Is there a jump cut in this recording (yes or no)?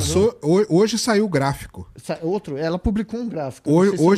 no